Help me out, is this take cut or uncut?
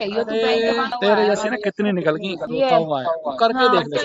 cut